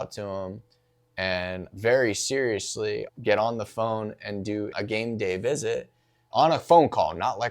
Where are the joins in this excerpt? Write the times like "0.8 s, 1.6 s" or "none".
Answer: 1.7 s, 3.0 s, 4.7 s, 6.3 s